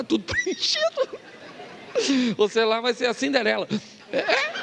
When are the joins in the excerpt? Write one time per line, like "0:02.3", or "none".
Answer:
none